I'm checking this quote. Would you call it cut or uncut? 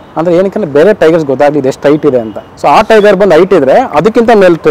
uncut